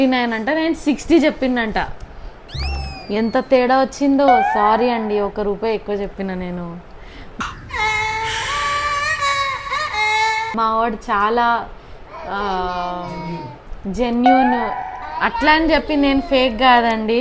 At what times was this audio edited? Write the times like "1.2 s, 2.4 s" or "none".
none